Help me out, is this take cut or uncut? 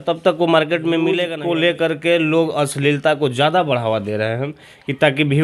cut